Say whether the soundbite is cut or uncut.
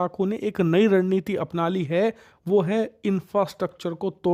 uncut